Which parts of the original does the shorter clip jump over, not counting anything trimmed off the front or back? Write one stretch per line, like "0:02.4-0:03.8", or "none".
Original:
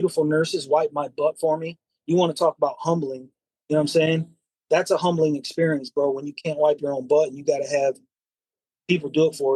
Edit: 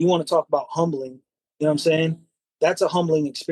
none